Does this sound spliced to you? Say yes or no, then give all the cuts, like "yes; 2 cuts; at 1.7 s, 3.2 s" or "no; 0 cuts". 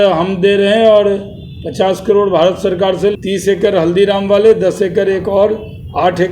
yes; 1 cut; at 3.1 s